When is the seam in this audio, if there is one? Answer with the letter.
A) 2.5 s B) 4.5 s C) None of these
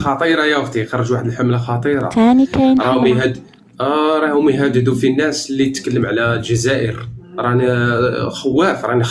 C